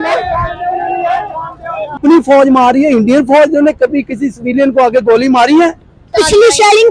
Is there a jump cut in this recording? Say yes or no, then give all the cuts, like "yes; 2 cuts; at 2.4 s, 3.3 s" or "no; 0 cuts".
yes; 2 cuts; at 2.0 s, 6.1 s